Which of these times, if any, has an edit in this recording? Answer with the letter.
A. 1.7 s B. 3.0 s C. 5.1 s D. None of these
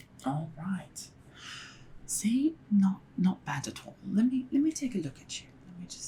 D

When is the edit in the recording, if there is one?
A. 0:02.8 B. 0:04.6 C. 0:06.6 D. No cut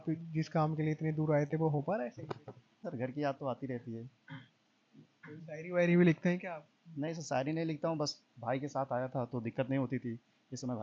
A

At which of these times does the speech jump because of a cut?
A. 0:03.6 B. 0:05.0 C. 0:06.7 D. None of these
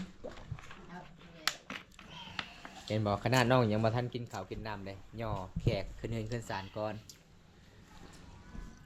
D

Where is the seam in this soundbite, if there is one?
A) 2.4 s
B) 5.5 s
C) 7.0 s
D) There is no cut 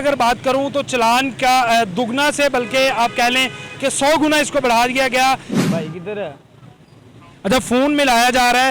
B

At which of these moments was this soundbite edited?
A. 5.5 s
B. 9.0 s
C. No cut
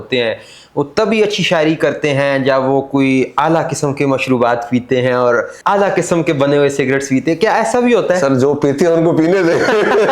A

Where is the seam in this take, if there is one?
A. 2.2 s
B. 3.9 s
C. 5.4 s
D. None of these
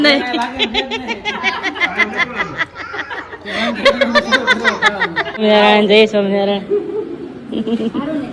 C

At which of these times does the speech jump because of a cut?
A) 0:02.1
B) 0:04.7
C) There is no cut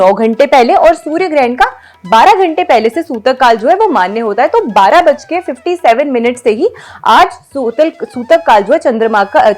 C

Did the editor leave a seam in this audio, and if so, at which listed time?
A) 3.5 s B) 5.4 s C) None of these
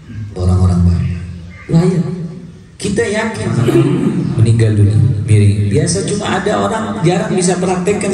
A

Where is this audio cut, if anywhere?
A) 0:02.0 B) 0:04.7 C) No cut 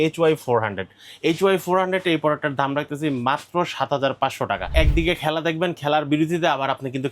B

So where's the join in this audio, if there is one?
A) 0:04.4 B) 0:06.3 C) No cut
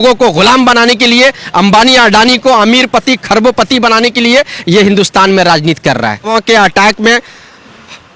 B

